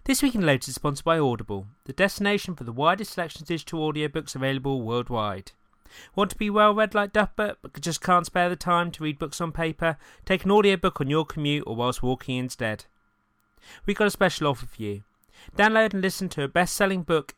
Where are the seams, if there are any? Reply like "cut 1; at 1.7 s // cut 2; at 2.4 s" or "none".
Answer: none

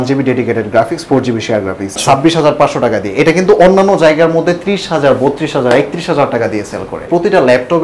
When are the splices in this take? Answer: cut 1; at 2.0 s // cut 2; at 7.0 s

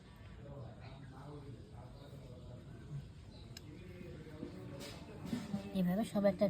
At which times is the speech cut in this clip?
none

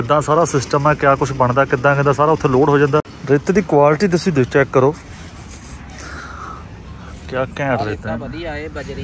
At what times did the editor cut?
cut 1; at 3.1 s

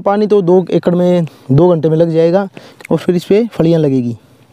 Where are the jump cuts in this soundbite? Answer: cut 1; at 2.6 s

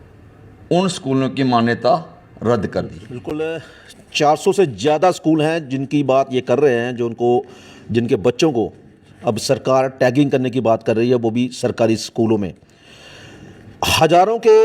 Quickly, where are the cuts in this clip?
cut 1; at 3.3 s

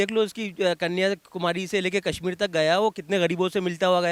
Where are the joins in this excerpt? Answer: none

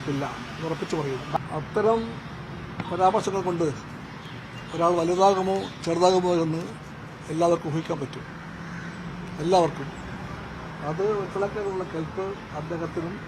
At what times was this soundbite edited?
cut 1; at 1.4 s

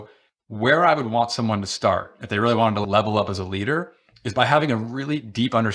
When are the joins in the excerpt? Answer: cut 1; at 2.8 s

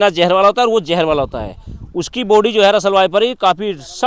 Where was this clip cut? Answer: none

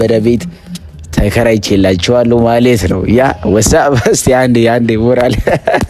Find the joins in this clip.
none

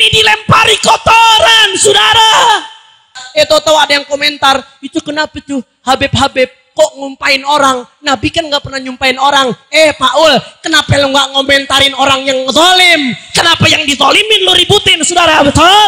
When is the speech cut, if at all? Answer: cut 1; at 3.2 s

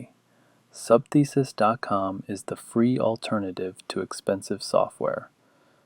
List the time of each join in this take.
none

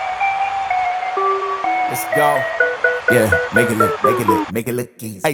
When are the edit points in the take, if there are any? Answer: none

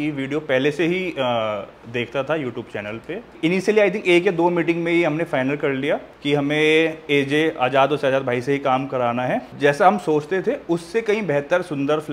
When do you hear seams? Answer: cut 1; at 3.3 s // cut 2; at 6.1 s

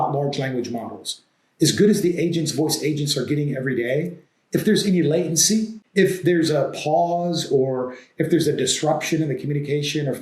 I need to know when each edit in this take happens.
cut 1; at 5.8 s

